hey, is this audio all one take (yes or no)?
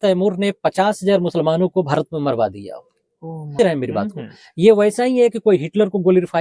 no